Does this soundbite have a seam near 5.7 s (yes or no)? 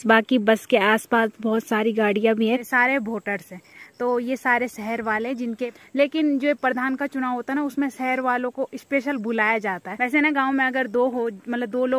yes